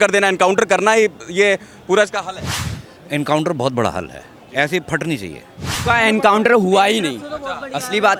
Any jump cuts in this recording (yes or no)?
no